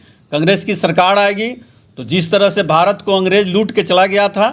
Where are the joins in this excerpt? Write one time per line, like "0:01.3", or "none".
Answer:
none